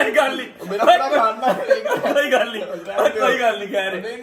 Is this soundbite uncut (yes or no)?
yes